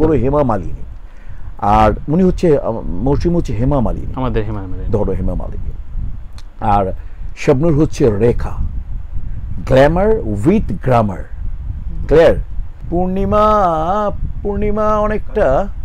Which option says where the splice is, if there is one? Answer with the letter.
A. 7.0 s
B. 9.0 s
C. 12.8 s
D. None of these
D